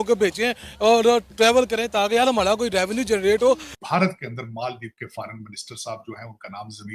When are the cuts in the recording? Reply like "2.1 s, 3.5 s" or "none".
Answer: 3.7 s